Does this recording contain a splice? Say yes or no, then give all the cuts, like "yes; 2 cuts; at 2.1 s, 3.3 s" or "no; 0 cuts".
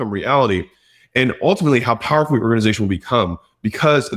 no; 0 cuts